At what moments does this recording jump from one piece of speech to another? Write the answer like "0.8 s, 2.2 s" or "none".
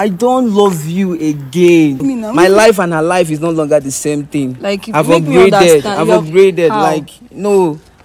2.0 s

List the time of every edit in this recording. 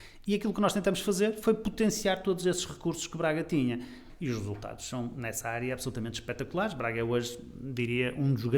4.0 s

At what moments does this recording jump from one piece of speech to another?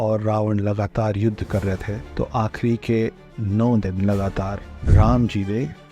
2.0 s

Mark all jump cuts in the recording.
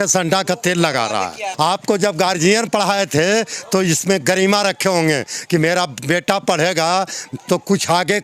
1.5 s

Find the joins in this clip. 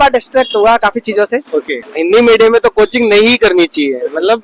1.8 s

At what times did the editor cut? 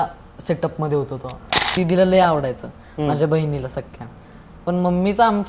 1.7 s

